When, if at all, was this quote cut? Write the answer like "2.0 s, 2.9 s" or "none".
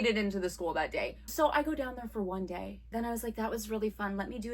1.2 s, 2.8 s